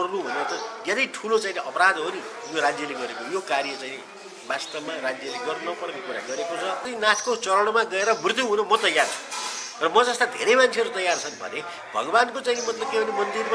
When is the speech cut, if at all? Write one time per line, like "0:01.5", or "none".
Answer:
0:06.9